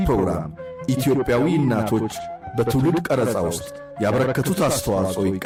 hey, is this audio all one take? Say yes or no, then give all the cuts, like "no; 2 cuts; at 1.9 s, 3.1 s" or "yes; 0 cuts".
yes; 0 cuts